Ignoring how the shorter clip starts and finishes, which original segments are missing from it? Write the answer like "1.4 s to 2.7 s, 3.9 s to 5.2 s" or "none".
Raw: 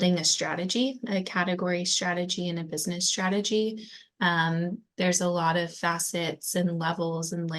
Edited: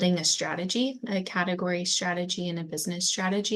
none